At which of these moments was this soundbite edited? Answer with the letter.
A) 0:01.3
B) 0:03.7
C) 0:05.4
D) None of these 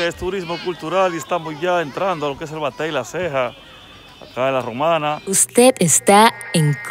C